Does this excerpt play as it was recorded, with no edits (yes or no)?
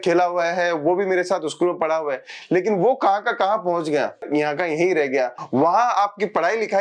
no